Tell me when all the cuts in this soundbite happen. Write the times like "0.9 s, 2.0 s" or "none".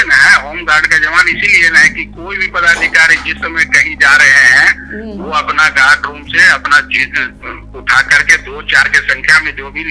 none